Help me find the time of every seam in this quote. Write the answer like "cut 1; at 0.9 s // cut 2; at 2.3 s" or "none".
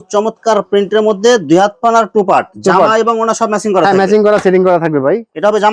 none